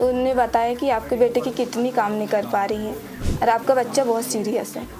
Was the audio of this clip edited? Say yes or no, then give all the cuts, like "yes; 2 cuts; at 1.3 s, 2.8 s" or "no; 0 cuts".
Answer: yes; 1 cut; at 3.2 s